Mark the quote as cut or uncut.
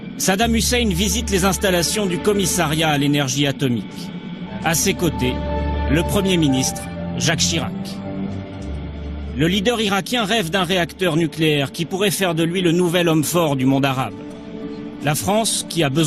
uncut